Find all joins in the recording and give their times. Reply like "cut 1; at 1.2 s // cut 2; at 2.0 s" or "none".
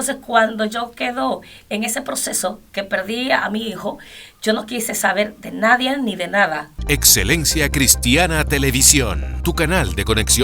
cut 1; at 6.7 s